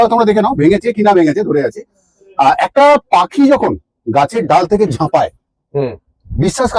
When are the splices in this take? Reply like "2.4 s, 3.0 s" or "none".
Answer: none